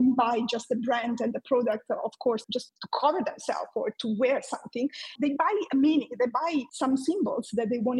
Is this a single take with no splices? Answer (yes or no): no